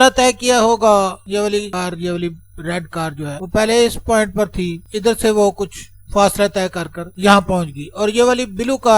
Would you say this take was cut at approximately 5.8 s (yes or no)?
no